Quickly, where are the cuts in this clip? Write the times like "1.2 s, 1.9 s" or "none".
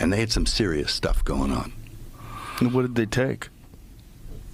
none

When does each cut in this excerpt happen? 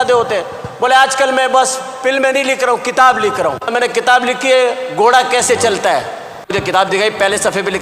3.7 s, 6.5 s

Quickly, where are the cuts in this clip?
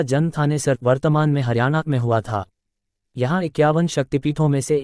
none

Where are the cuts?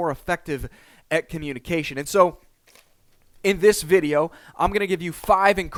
none

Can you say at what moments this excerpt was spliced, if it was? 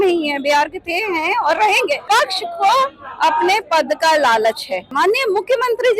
2.0 s, 4.9 s

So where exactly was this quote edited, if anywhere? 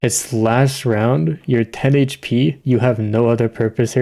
2.6 s

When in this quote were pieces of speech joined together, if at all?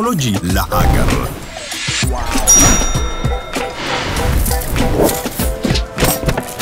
none

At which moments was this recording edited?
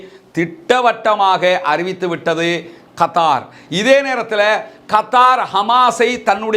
none

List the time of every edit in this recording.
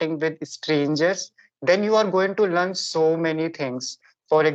none

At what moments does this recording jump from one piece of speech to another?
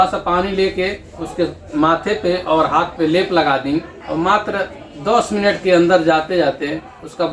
none

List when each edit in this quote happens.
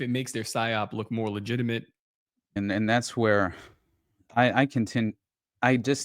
2.6 s

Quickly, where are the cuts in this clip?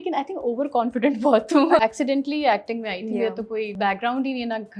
1.8 s, 3.7 s

